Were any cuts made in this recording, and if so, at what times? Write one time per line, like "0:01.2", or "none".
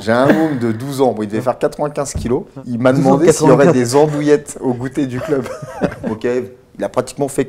0:02.6
0:06.1